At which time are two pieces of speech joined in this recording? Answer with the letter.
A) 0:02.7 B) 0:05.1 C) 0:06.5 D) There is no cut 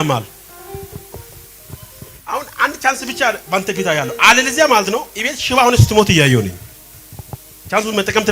D